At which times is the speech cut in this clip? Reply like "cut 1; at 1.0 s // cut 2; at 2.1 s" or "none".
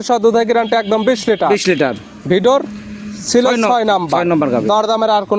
none